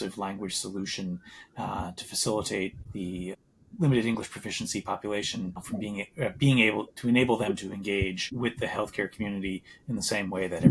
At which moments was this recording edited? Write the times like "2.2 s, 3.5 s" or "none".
none